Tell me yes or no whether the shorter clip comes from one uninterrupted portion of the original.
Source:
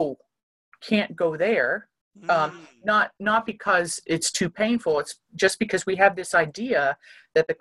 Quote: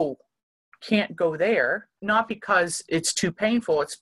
no